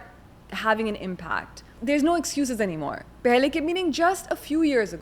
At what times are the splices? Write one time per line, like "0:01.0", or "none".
0:01.7